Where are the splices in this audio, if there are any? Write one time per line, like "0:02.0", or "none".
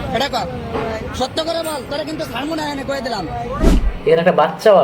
0:03.8